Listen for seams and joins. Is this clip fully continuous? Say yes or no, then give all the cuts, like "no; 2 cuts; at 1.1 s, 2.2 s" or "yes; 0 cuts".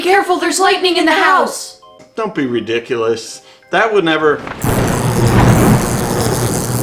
no; 1 cut; at 2.0 s